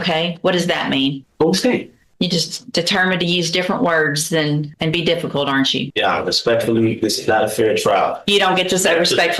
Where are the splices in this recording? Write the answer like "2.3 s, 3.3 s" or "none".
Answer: 1.2 s, 2.0 s, 4.7 s, 5.9 s